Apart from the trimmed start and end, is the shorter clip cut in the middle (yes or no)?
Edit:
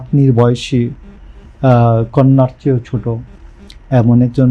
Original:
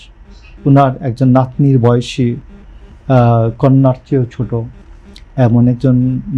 no